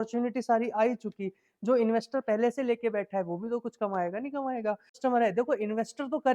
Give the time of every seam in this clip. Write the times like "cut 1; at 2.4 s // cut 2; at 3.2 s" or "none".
cut 1; at 5.0 s